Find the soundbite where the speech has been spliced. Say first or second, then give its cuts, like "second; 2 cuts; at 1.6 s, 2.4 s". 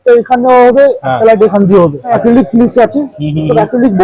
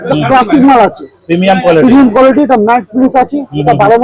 first; 1 cut; at 2.2 s